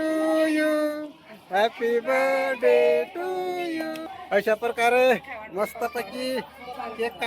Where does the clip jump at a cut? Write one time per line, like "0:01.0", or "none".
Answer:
0:04.1